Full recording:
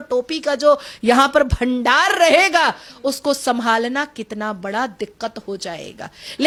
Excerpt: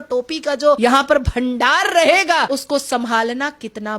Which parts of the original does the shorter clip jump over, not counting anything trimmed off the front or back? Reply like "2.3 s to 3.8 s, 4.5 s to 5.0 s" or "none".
0.8 s to 1.0 s, 2.7 s to 3.0 s